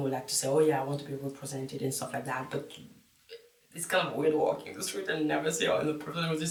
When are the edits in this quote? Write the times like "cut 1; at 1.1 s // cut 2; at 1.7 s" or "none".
none